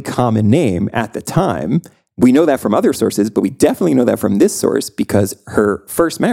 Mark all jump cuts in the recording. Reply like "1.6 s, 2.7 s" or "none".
2.0 s